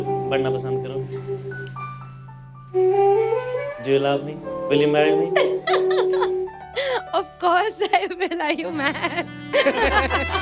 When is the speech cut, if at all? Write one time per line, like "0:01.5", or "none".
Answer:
none

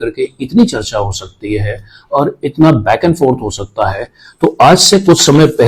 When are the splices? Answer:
none

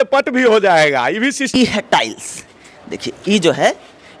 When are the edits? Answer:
0:01.4

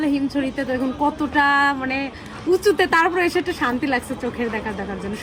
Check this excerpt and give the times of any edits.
none

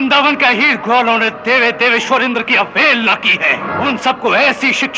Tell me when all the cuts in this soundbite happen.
0:03.7

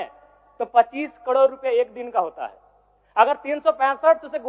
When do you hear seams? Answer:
none

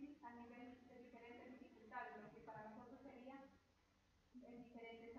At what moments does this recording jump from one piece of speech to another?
0:01.2

